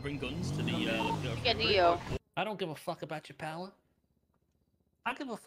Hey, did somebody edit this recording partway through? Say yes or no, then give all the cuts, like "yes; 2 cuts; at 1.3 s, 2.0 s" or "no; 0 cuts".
yes; 1 cut; at 2.3 s